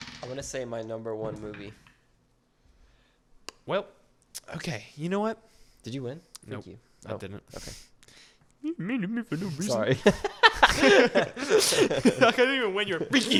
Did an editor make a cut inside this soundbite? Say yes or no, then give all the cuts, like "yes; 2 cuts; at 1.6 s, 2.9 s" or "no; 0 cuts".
no; 0 cuts